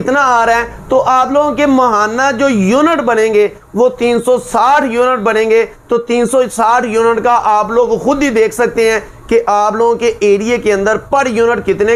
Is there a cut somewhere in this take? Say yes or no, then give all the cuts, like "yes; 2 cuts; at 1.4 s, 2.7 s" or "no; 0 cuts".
no; 0 cuts